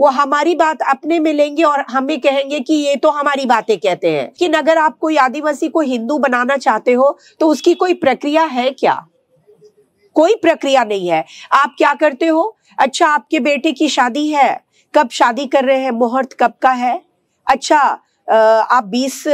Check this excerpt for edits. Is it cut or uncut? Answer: cut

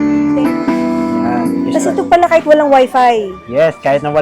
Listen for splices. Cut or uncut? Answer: cut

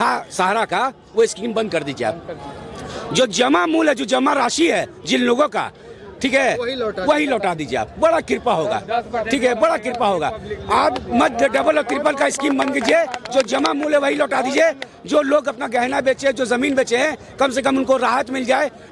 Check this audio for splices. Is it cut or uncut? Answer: uncut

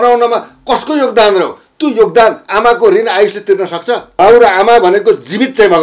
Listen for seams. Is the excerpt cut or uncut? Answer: cut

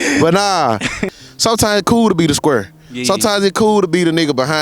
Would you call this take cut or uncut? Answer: cut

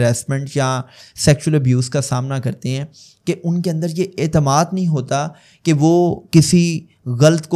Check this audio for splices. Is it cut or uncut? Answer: uncut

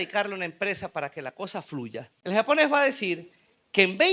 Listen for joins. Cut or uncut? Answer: cut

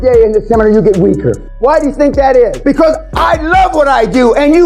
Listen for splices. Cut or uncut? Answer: cut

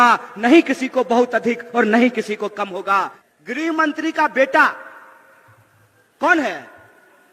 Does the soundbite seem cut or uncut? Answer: cut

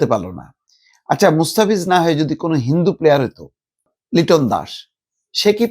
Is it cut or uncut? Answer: cut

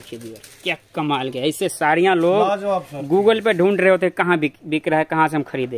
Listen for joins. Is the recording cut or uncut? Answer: uncut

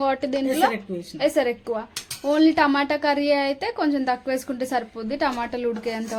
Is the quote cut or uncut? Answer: uncut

